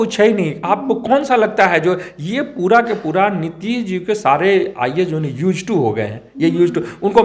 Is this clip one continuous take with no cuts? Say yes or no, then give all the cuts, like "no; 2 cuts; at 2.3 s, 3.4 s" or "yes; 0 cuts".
yes; 0 cuts